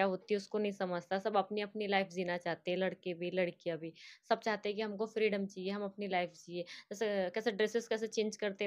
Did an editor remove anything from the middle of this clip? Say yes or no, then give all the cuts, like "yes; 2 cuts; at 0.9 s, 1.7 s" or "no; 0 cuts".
no; 0 cuts